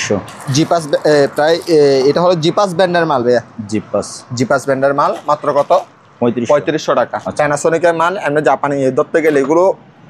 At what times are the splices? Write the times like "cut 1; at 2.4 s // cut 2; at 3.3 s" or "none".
cut 1; at 7.2 s